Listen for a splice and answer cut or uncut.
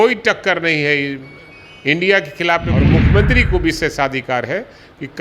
cut